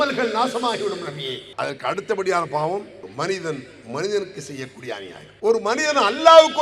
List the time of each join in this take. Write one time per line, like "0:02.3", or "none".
0:01.4
0:03.0